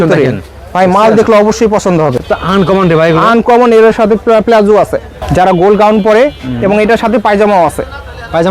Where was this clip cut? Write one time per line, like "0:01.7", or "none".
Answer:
0:02.2
0:05.1